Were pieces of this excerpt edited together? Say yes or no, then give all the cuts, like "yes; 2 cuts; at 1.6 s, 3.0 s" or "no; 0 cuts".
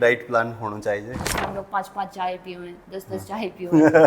yes; 1 cut; at 1.3 s